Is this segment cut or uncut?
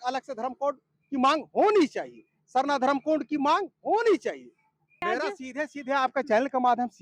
cut